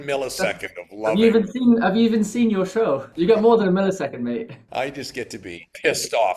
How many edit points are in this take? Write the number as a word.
zero